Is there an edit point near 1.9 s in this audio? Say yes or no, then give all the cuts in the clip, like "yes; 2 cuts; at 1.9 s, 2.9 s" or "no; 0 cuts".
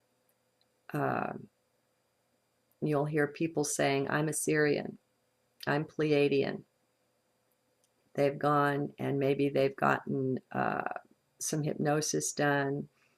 yes; 1 cut; at 1.9 s